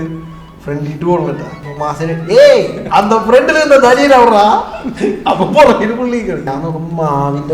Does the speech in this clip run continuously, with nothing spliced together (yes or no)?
no